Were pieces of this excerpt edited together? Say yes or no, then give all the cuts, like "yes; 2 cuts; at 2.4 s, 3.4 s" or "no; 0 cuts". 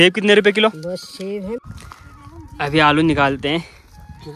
yes; 1 cut; at 1.7 s